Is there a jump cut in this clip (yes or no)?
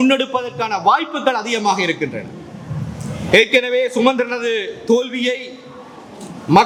no